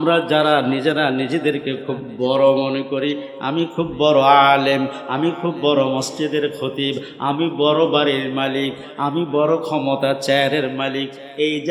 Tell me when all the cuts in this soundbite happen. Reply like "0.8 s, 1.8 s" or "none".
none